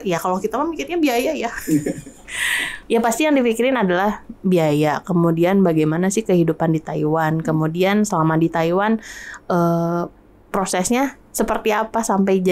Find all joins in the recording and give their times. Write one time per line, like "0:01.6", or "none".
none